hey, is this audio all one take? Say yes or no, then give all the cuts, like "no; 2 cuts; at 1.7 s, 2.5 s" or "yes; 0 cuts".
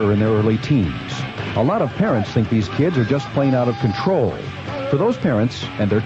no; 1 cut; at 3.2 s